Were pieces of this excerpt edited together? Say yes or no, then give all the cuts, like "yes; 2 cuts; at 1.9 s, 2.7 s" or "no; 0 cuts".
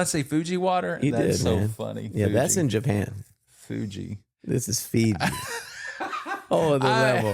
no; 0 cuts